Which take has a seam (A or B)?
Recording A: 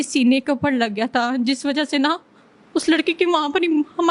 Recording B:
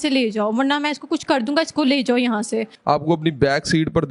B